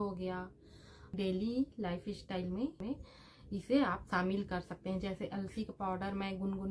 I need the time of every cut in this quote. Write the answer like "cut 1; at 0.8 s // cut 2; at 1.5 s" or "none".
cut 1; at 1.1 s // cut 2; at 2.8 s